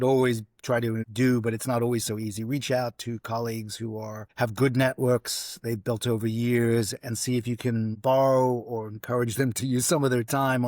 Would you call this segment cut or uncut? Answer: cut